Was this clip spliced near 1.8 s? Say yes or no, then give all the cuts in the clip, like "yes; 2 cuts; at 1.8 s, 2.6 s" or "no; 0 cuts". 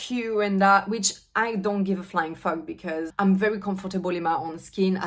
no; 1 cut; at 3.1 s